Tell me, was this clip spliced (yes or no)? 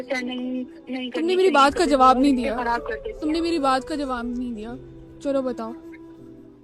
yes